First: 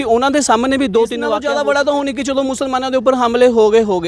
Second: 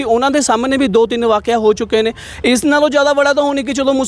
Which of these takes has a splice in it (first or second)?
first